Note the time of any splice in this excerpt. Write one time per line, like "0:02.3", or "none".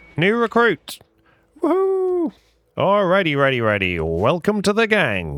none